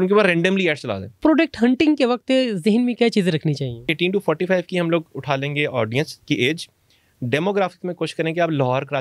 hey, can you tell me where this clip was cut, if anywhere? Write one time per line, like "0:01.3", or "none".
0:01.2
0:03.9